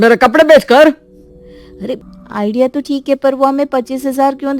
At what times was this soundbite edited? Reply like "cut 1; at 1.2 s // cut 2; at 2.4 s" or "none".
cut 1; at 2.1 s